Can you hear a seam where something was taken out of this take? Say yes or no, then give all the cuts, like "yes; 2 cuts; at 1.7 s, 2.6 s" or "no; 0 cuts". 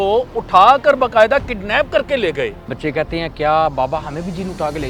yes; 1 cut; at 2.7 s